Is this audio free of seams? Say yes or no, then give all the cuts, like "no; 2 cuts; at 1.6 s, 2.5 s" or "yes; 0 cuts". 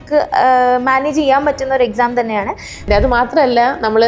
no; 1 cut; at 2.9 s